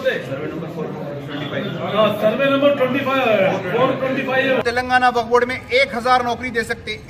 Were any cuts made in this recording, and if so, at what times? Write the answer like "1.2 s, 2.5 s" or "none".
4.6 s